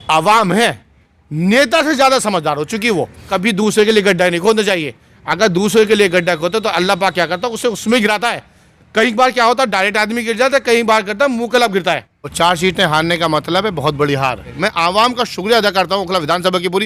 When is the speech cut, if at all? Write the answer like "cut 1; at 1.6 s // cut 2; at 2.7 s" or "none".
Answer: cut 1; at 3.3 s // cut 2; at 12.2 s // cut 3; at 14.5 s